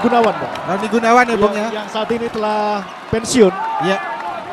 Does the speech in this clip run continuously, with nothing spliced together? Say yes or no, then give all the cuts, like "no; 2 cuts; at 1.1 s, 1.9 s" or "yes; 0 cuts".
yes; 0 cuts